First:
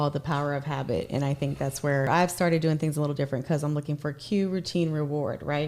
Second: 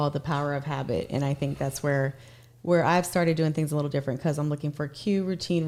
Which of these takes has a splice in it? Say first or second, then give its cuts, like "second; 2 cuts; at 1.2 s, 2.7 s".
first; 1 cut; at 2.1 s